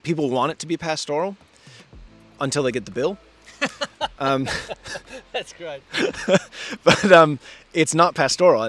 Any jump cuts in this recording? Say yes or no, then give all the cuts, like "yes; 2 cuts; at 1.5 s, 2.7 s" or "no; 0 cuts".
no; 0 cuts